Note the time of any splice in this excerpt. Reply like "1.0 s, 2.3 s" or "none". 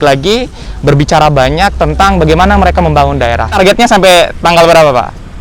3.5 s